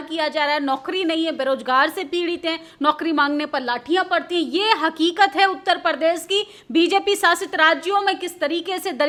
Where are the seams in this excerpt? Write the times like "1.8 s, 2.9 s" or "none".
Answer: none